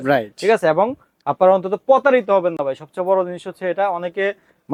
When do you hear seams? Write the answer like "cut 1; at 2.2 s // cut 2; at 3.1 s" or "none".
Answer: none